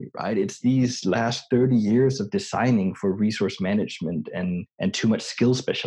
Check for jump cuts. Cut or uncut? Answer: cut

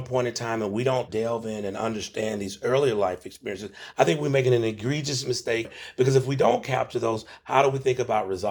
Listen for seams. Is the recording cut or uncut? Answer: cut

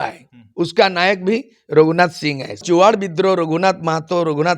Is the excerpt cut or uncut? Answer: cut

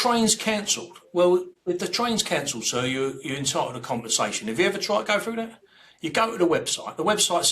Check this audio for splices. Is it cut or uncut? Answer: cut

